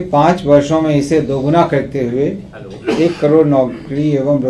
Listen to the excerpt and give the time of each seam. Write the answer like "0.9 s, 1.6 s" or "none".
none